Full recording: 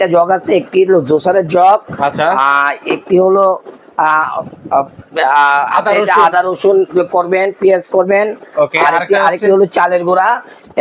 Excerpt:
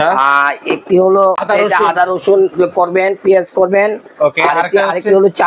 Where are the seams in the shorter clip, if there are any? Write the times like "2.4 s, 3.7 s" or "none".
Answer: 1.4 s